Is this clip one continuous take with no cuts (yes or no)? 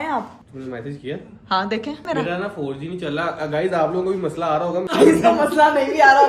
no